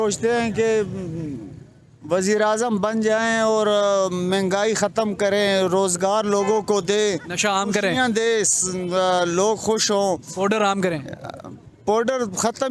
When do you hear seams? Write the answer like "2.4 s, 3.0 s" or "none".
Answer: none